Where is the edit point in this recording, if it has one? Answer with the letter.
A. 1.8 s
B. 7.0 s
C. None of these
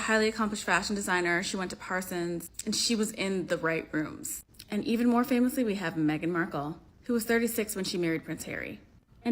A